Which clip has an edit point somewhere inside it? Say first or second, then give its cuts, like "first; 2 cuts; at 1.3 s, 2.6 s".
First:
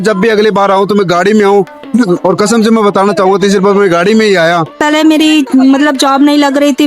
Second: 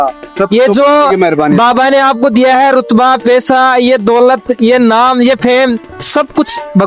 first; 1 cut; at 4.8 s